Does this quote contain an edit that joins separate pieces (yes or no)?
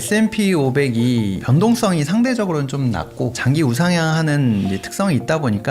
yes